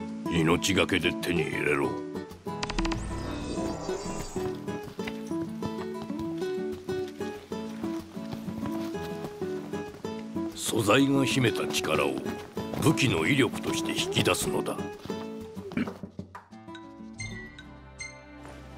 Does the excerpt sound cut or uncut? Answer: cut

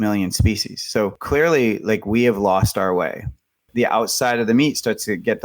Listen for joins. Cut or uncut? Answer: cut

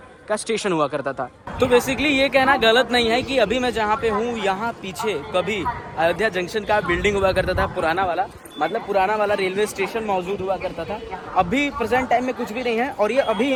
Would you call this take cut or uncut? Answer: uncut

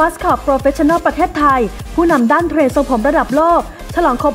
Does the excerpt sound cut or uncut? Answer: uncut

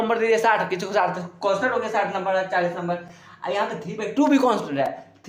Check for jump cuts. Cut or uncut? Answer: uncut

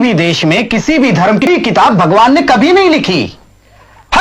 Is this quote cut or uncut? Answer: cut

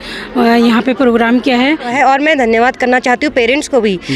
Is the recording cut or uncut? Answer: cut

